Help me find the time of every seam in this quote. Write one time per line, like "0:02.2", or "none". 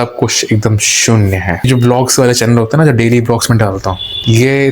0:01.7